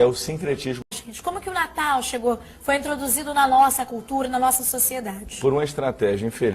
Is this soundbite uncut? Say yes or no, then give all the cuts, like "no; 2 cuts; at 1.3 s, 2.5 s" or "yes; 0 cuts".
no; 1 cut; at 0.9 s